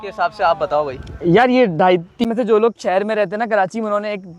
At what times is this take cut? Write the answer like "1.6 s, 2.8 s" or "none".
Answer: 2.2 s